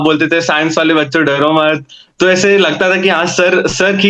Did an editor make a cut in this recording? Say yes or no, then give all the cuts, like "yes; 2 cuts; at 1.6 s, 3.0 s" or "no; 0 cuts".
no; 0 cuts